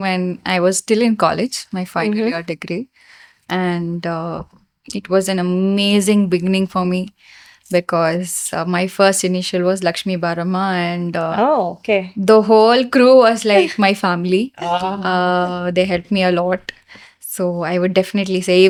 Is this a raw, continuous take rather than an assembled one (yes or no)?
yes